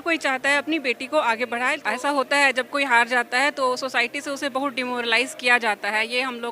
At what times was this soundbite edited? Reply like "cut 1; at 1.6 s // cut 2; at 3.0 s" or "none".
cut 1; at 1.8 s